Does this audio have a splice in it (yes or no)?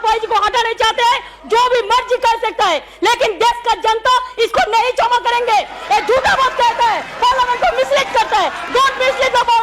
no